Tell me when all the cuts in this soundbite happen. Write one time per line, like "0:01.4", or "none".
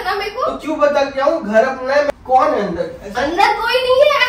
0:02.1